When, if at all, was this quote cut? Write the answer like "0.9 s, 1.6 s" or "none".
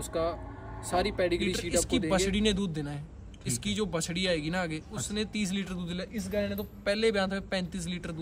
2.0 s

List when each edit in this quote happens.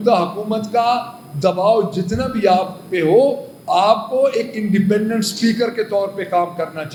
none

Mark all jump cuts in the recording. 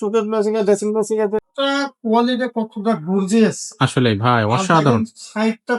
1.5 s

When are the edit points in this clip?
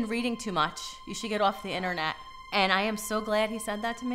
2.3 s

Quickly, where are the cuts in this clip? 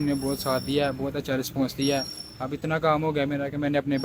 none

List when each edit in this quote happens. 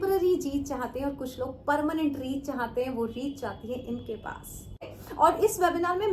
4.9 s

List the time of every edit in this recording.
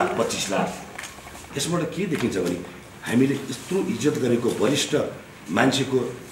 none

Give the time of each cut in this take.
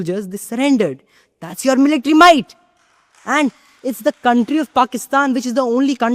none

